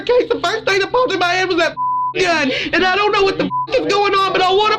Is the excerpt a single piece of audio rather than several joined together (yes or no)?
no